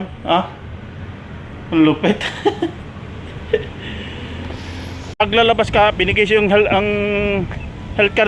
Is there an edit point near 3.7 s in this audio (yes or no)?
no